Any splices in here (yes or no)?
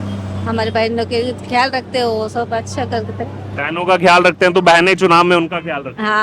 no